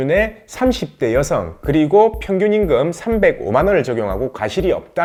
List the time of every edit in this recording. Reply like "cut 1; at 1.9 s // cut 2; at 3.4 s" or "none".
none